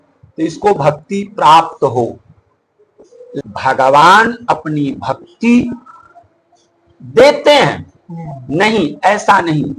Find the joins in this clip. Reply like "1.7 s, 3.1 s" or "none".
3.3 s